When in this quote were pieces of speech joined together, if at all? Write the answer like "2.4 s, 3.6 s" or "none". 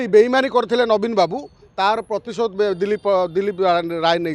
none